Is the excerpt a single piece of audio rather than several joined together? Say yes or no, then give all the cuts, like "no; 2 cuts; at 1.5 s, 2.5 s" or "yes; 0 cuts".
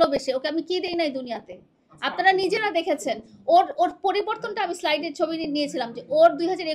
yes; 0 cuts